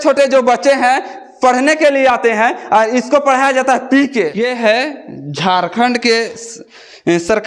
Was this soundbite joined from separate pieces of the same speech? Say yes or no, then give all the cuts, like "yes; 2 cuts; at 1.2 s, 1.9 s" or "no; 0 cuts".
yes; 1 cut; at 4.4 s